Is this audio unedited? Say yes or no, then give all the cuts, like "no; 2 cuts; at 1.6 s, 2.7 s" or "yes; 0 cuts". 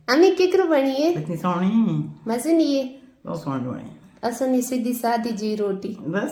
yes; 0 cuts